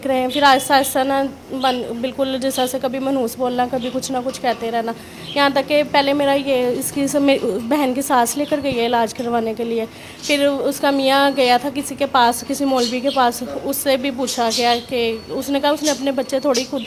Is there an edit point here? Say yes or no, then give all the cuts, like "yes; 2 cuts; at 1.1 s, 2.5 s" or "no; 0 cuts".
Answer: no; 0 cuts